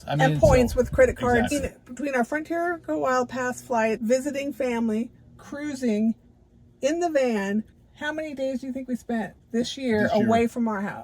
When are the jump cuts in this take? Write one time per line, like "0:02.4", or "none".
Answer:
0:01.5
0:04.0
0:09.4